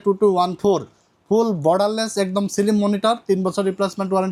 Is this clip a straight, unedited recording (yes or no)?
yes